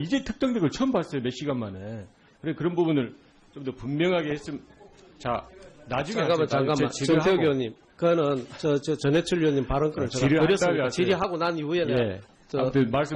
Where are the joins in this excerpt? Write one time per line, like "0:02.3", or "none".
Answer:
0:03.4